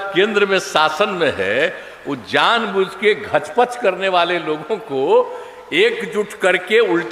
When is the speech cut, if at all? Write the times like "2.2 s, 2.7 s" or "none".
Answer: none